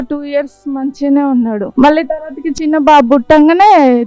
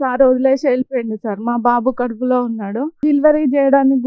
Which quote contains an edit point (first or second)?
first